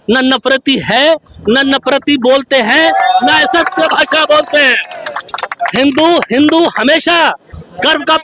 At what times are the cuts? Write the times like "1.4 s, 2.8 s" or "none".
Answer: none